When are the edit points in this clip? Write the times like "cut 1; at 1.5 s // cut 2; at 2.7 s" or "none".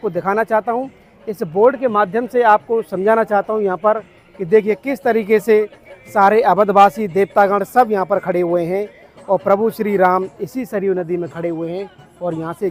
none